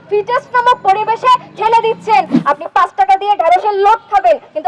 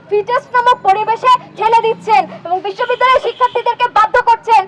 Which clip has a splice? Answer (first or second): first